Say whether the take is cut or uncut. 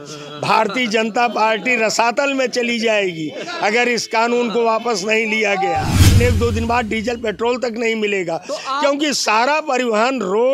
cut